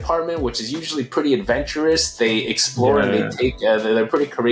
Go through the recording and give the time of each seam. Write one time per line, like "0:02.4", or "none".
none